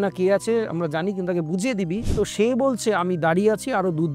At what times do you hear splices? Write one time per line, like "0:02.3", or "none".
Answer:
0:02.1